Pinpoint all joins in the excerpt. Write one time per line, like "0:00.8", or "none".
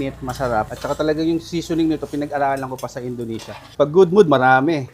0:03.7